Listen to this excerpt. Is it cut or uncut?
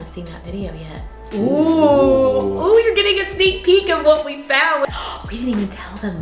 cut